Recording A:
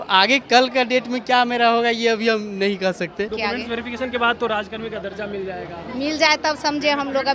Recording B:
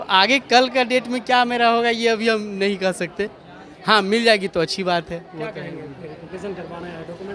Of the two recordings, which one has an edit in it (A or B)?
A